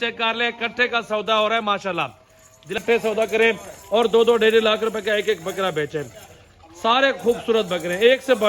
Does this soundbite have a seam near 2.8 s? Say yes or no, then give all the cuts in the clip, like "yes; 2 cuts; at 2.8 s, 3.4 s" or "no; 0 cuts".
yes; 1 cut; at 2.8 s